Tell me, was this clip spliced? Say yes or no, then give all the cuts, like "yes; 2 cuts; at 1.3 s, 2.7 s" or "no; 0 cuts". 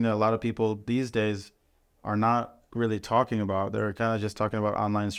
no; 0 cuts